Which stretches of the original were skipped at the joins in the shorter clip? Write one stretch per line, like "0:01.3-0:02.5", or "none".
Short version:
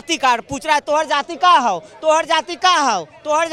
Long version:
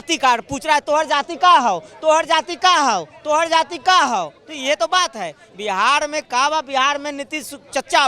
none